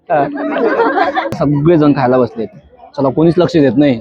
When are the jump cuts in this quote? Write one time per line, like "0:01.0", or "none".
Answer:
0:01.4